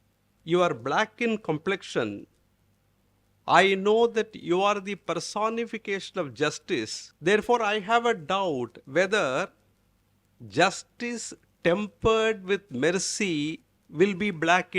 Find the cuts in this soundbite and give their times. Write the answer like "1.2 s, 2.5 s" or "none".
7.0 s